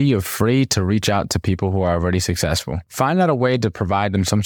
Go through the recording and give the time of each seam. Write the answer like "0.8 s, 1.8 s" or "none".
none